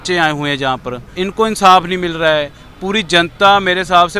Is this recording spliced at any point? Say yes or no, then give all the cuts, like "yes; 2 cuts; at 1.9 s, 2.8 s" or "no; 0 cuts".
yes; 1 cut; at 1.0 s